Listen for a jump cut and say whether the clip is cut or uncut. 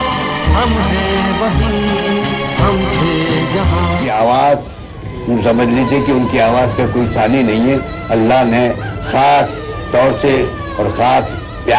cut